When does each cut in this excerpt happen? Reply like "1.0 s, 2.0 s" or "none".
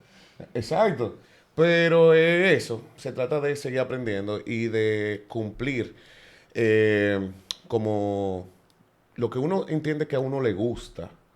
none